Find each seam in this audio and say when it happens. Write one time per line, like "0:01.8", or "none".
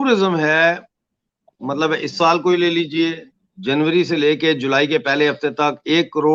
none